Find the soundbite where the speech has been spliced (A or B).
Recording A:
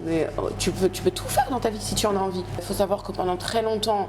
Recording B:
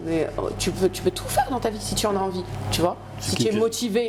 A